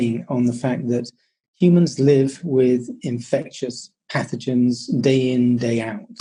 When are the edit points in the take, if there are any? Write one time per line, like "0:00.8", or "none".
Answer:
none